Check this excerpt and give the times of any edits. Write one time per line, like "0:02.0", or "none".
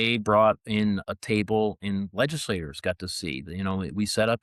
0:01.1